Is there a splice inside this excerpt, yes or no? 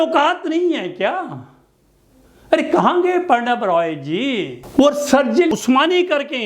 yes